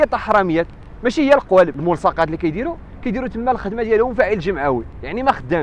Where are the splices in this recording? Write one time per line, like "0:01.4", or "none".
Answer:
0:01.8